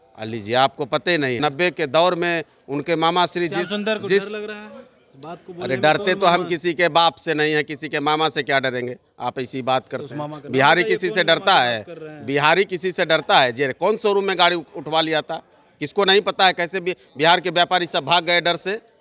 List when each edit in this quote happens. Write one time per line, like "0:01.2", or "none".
0:01.4

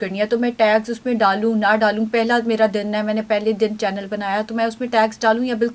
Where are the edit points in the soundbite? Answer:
none

